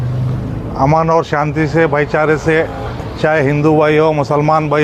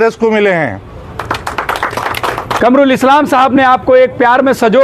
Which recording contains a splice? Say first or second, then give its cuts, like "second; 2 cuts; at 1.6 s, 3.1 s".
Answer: second; 1 cut; at 2.6 s